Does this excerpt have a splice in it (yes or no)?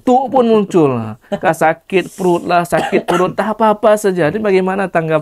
no